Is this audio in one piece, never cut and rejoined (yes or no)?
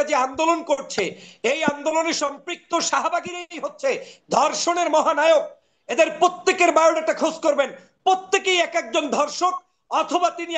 yes